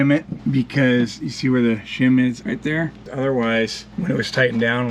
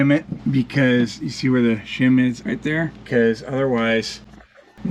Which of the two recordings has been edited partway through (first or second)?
first